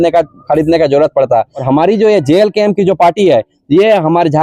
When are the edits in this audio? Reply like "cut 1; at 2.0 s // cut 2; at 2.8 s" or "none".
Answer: cut 1; at 1.6 s

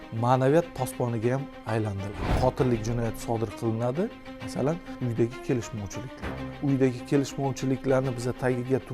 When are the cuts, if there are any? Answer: cut 1; at 2.3 s // cut 2; at 4.9 s // cut 3; at 6.6 s

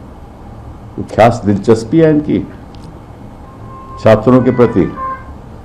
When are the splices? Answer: none

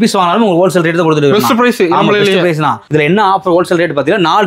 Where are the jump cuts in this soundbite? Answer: cut 1; at 2.8 s

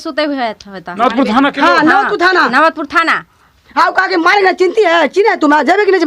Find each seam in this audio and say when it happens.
cut 1; at 3.6 s

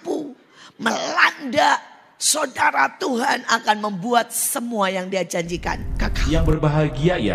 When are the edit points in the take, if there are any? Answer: cut 1; at 6.2 s

